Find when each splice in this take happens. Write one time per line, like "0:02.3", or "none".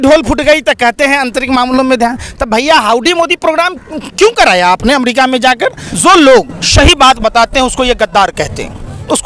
0:05.8